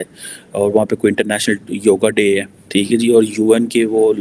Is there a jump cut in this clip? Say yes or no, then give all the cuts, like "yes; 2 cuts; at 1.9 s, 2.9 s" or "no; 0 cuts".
yes; 1 cut; at 2.6 s